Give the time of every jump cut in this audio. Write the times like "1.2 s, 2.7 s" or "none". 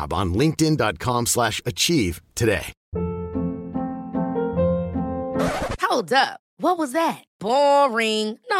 2.8 s